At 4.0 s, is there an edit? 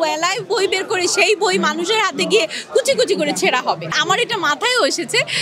yes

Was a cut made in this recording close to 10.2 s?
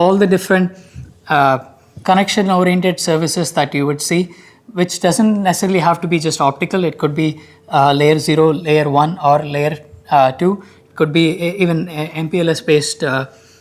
no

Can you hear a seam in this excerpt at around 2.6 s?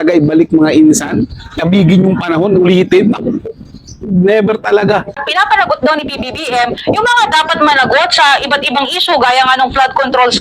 no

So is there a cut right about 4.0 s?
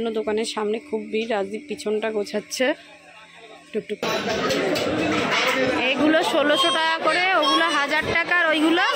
yes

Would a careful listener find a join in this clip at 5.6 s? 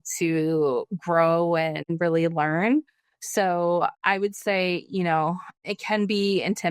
yes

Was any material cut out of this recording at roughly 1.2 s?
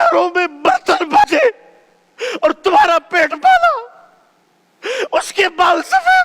yes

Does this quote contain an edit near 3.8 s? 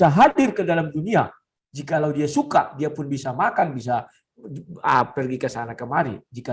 no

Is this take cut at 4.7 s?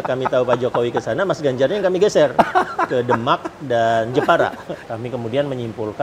yes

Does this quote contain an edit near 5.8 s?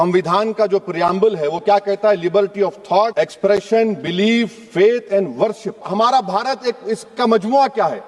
yes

